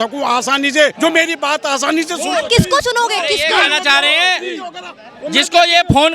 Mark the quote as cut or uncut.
cut